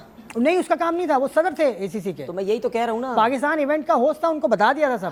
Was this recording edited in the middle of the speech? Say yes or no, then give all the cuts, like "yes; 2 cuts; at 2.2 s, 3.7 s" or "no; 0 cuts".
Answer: no; 0 cuts